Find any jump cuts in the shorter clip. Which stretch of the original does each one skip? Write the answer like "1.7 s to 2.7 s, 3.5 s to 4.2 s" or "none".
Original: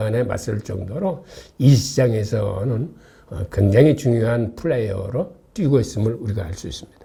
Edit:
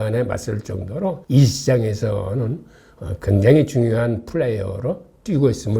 1.2 s to 1.5 s